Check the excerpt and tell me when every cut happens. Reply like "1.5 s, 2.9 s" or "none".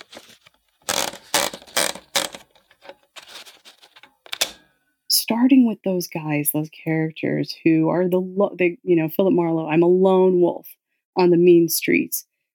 4.8 s